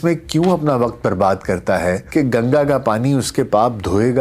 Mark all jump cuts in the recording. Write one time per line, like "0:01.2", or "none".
0:02.0